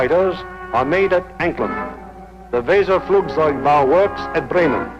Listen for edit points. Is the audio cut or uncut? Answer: cut